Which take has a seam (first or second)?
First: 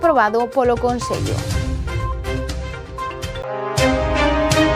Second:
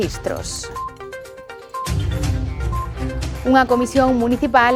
first